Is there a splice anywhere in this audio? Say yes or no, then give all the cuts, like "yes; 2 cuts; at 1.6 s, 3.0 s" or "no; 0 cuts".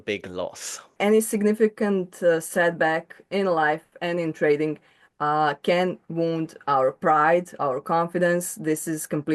yes; 1 cut; at 0.9 s